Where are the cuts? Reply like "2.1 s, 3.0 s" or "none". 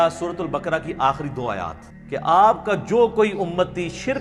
1.9 s